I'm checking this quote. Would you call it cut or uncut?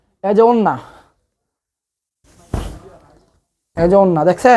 uncut